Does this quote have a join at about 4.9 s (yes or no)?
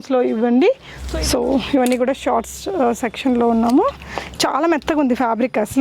no